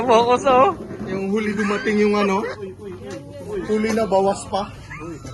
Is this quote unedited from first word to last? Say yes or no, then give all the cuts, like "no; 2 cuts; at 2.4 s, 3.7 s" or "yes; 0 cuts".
yes; 0 cuts